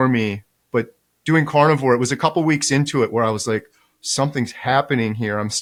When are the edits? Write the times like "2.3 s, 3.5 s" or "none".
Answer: none